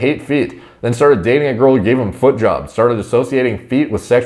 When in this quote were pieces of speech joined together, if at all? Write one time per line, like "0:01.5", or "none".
none